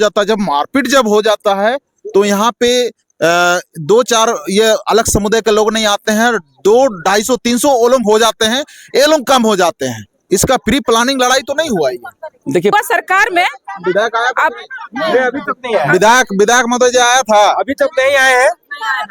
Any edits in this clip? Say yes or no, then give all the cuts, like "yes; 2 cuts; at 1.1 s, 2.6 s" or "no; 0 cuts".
yes; 1 cut; at 12.7 s